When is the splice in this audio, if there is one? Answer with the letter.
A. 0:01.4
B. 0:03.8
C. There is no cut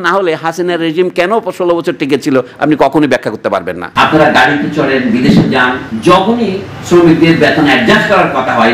B